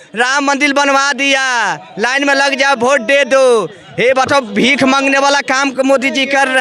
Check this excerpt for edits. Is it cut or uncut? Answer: uncut